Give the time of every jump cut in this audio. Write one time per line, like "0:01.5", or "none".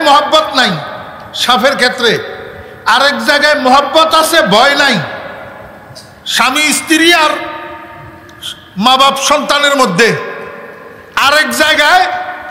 none